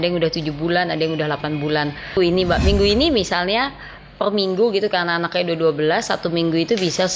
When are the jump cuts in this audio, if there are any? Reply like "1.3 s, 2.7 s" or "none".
2.2 s